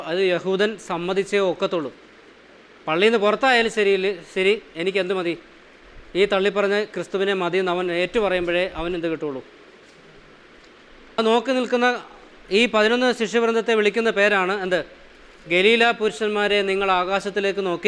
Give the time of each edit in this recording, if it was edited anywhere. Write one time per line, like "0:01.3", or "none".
0:11.2